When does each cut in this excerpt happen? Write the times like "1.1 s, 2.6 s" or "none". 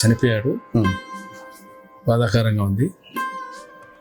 3.0 s